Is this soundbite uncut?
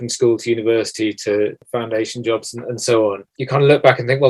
no; 2 cuts; at 1.6 s, 3.3 s

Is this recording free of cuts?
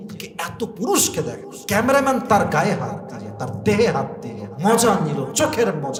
yes; 0 cuts

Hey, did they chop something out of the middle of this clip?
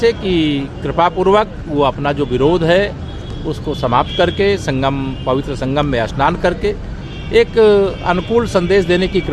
no; 0 cuts

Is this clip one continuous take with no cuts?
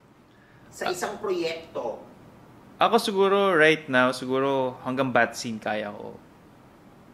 yes; 0 cuts

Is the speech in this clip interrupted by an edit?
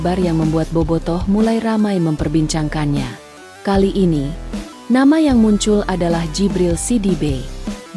no; 0 cuts

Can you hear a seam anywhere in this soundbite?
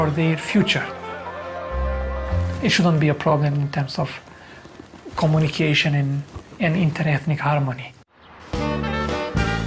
yes; 1 cut; at 6.4 s

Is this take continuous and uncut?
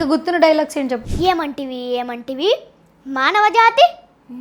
no; 1 cut; at 1.1 s

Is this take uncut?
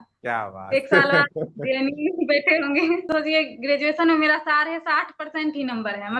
no; 1 cut; at 3.1 s

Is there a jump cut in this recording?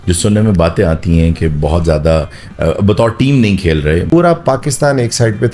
yes; 1 cut; at 4.1 s

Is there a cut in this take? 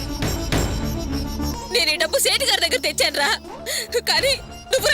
yes; 1 cut; at 1.5 s

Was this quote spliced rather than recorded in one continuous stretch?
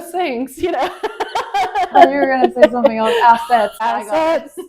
yes; 2 cuts; at 1.9 s, 3.7 s

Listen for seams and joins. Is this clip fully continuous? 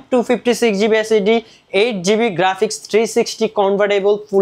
yes; 0 cuts

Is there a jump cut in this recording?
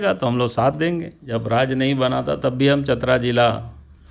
yes; 1 cut; at 1.2 s

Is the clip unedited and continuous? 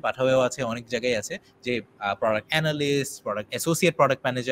yes; 0 cuts

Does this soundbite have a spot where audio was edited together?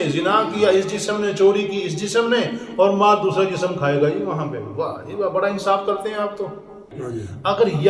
yes; 1 cut; at 6.9 s

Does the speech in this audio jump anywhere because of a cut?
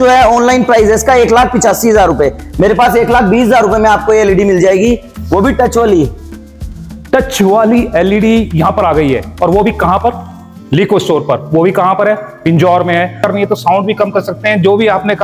no; 0 cuts

